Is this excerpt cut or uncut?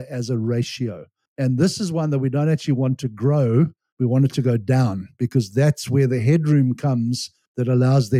uncut